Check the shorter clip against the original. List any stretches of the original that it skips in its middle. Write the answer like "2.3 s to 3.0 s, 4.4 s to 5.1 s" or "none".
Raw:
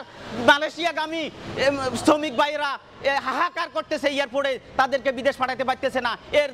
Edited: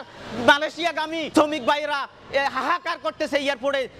1.3 s to 2.0 s